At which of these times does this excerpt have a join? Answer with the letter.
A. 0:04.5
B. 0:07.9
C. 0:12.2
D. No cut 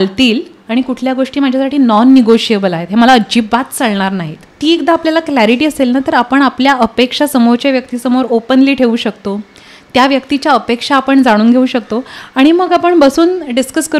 A